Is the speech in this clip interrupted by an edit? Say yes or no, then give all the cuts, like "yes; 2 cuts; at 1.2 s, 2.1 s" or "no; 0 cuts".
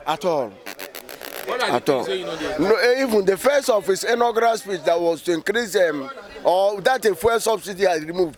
no; 0 cuts